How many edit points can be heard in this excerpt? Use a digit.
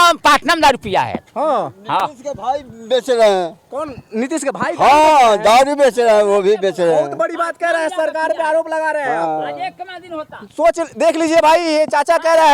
0